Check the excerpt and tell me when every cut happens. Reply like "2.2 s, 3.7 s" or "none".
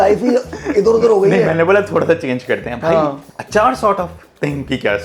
3.2 s